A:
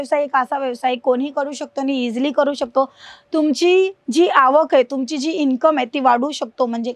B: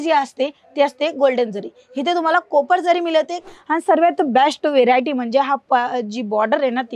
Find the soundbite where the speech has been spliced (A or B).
B